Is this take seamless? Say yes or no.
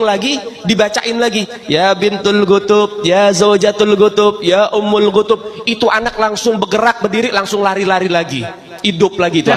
yes